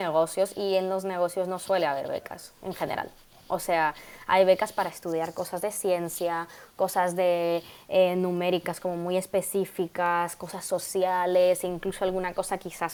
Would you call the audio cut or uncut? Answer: uncut